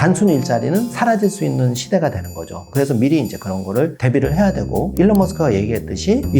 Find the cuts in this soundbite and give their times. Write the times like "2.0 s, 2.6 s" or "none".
0.9 s, 2.6 s